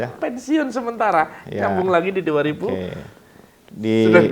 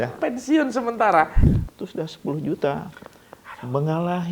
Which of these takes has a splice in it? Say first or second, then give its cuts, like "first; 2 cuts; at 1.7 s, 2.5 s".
second; 1 cut; at 1.4 s